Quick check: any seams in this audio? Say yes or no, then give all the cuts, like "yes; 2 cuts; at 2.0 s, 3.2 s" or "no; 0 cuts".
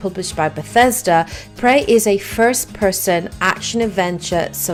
no; 0 cuts